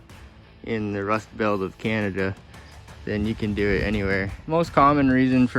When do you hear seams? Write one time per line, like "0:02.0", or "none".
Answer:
0:04.3